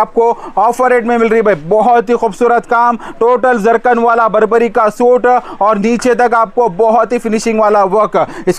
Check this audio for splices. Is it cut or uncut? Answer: uncut